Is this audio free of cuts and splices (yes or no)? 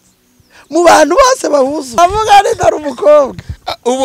no